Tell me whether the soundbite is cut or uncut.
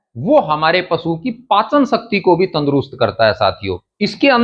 uncut